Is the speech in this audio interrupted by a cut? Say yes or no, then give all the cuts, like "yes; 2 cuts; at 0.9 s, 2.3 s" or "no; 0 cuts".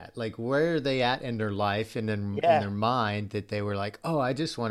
no; 0 cuts